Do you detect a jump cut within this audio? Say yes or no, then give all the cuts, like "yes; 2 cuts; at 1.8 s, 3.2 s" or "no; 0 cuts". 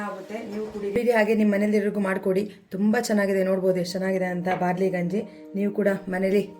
yes; 1 cut; at 1.0 s